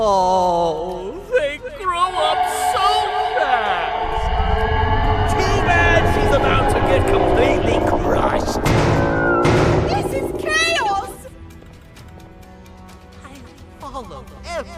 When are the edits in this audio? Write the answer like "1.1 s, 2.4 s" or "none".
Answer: none